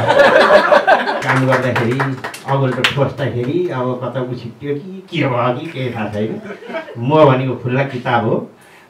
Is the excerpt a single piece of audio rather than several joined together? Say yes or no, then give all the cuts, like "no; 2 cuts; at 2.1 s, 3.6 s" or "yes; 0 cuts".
no; 1 cut; at 1.2 s